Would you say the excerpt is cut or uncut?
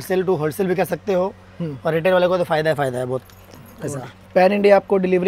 uncut